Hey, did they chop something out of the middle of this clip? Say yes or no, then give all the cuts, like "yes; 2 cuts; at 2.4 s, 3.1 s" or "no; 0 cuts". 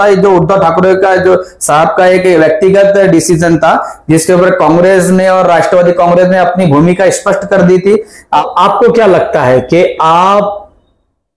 yes; 1 cut; at 8.4 s